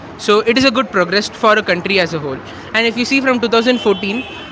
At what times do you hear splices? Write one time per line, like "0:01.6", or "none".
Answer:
none